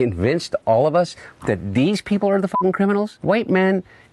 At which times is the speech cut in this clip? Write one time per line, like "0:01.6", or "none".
0:03.1